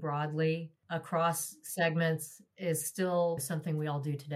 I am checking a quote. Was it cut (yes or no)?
yes